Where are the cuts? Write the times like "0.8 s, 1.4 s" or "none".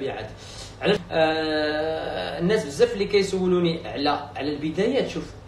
1.0 s